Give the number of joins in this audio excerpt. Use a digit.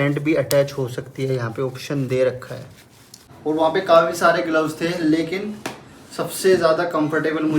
1